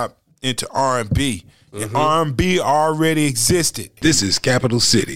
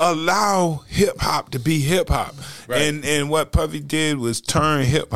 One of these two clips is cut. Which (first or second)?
first